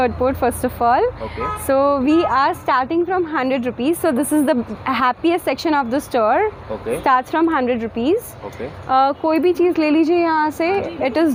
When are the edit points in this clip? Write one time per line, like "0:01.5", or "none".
none